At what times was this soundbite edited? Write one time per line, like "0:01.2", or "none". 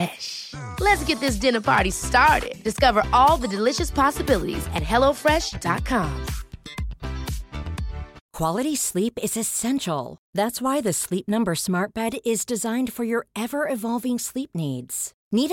0:08.2